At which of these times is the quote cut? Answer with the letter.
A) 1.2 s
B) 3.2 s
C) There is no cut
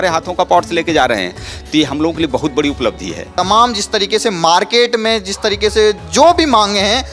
B